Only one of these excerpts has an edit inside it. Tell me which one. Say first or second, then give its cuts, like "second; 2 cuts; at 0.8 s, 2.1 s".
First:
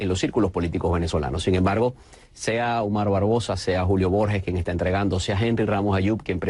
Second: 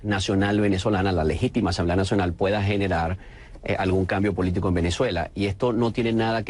first; 1 cut; at 1.0 s